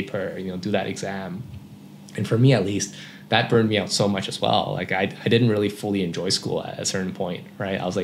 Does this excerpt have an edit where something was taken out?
no; 0 cuts

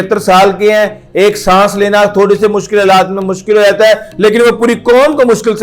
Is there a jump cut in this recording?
no; 0 cuts

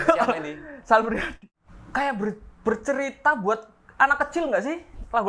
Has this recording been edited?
yes; 1 cut; at 1.3 s

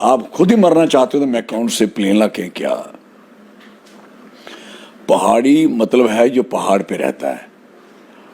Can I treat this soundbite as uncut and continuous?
no; 1 cut; at 1.6 s

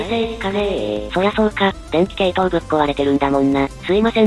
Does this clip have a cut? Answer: no; 0 cuts

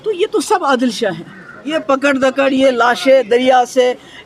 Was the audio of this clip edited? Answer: yes; 1 cut; at 1.7 s

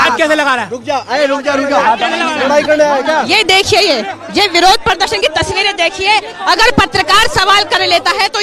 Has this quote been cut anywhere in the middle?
no; 0 cuts

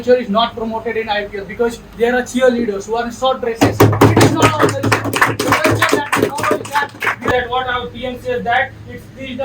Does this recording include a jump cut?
yes; 1 cut; at 7.3 s

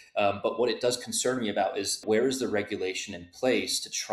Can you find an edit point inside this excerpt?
yes; 1 cut; at 2.0 s

